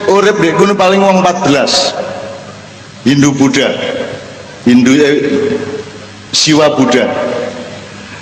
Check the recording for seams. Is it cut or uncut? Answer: uncut